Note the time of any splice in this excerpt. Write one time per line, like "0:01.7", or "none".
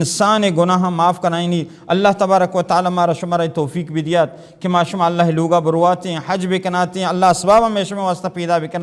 none